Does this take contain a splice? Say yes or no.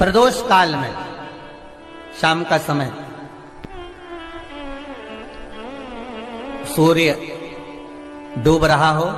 no